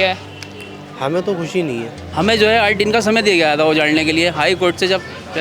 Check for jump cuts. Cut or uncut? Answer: cut